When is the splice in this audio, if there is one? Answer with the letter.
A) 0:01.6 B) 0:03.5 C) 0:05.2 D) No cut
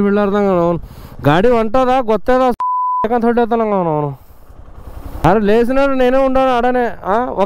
C